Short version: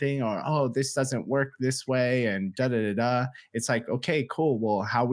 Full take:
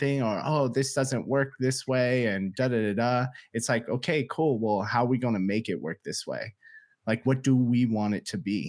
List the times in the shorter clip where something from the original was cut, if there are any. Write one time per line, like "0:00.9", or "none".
none